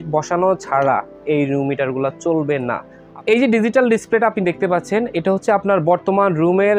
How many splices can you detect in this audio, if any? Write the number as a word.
one